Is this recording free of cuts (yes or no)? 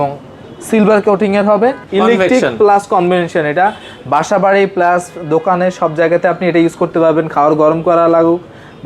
no